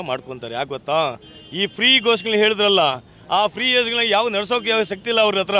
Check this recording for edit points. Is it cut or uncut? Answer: uncut